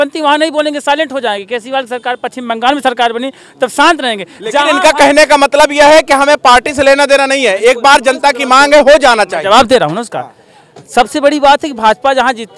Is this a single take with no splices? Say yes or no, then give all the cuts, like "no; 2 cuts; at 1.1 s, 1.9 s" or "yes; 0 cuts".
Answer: yes; 0 cuts